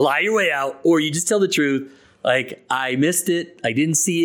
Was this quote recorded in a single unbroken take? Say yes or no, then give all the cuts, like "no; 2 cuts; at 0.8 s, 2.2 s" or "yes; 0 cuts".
yes; 0 cuts